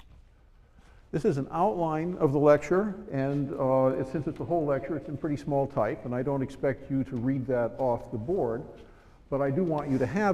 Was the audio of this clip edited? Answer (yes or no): yes